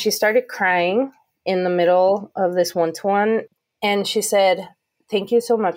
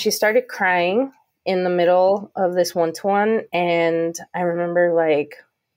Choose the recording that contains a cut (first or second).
first